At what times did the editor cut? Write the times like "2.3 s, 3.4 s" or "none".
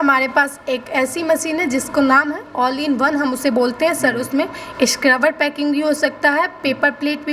none